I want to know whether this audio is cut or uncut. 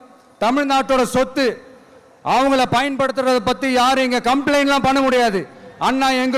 uncut